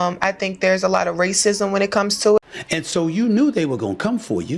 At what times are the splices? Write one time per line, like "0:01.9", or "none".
0:02.6